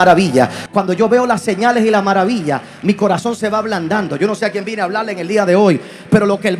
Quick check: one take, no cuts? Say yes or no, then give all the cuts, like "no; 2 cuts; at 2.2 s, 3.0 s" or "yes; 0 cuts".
yes; 0 cuts